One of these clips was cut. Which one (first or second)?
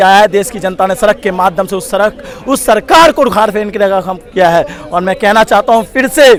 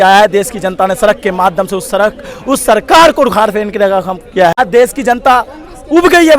second